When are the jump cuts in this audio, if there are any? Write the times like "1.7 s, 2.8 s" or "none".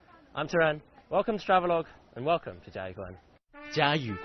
none